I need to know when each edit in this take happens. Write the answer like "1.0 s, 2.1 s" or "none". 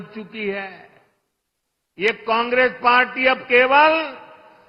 none